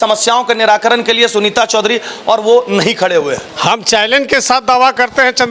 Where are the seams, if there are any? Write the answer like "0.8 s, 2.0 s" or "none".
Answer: 3.5 s